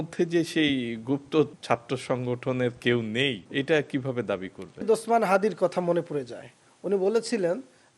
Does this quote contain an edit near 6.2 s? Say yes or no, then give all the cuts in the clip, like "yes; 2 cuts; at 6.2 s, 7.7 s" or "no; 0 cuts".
no; 3 cuts; at 1.6 s, 3.4 s, 4.8 s